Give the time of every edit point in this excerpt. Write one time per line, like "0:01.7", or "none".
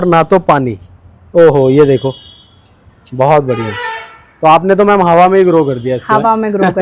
none